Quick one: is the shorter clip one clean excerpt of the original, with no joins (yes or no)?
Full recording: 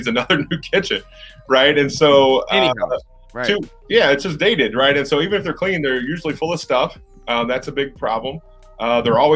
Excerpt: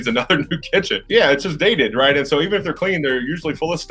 no